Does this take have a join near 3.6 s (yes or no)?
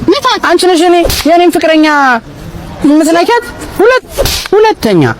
yes